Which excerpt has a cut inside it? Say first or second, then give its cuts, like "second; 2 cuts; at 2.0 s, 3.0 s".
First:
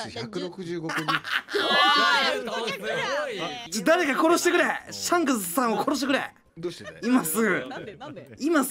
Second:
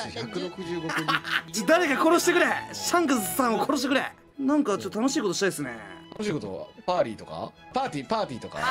second; 3 cuts; at 1.4 s, 4.2 s, 7.7 s